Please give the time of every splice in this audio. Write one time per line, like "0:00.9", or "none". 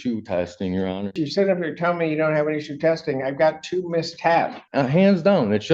0:01.2
0:04.6